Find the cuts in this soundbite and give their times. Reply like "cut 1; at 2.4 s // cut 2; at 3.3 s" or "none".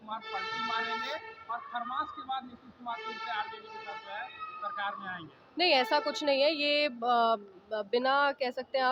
none